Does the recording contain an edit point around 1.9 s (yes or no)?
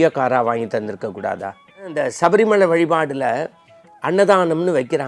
yes